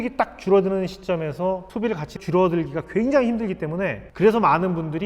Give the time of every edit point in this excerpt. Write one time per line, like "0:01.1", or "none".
0:01.7